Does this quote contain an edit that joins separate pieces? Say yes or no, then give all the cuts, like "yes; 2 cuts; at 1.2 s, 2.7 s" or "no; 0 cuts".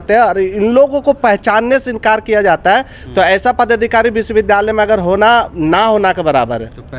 no; 0 cuts